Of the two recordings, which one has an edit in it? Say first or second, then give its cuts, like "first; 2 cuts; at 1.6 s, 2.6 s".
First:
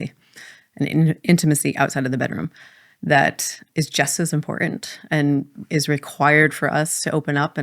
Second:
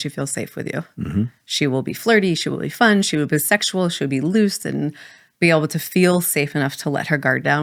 first; 1 cut; at 3.7 s